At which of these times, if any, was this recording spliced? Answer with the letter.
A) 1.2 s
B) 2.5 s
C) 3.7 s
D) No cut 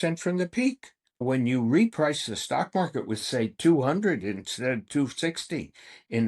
A